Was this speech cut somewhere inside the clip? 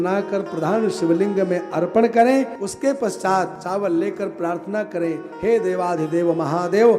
yes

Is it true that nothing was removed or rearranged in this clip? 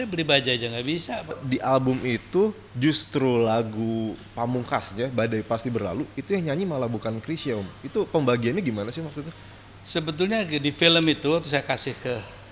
no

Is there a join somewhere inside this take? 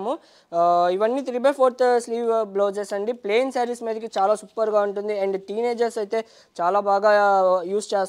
no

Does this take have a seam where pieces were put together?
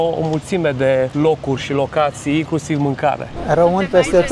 yes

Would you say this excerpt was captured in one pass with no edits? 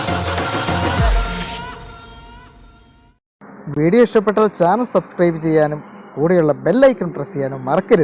yes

